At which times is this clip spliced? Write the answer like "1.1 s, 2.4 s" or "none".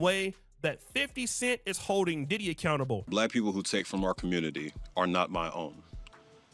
3.0 s